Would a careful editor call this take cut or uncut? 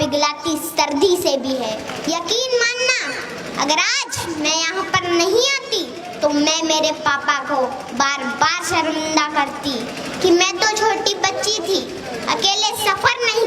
cut